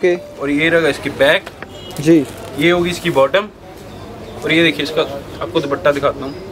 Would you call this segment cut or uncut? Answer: uncut